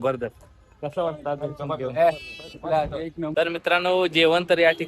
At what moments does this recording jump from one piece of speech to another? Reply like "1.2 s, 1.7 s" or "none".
3.3 s